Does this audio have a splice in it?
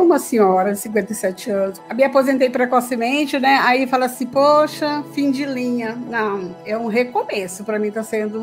no; 0 cuts

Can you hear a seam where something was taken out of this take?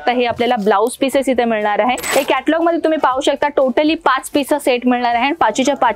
yes; 1 cut; at 2.1 s

